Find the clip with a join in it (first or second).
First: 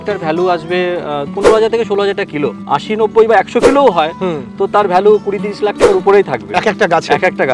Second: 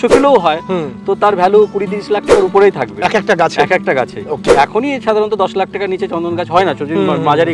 first